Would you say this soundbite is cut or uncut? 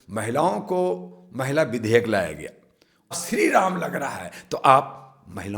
cut